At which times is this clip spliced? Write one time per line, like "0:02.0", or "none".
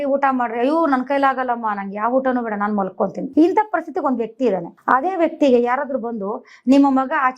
0:03.3
0:04.7